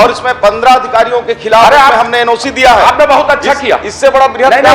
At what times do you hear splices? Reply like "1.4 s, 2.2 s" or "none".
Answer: none